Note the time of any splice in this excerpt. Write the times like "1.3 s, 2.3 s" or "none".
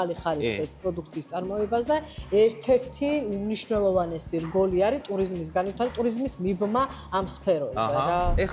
none